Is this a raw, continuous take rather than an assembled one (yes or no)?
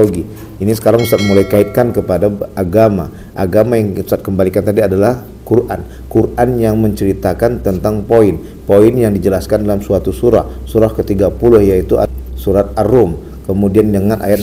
no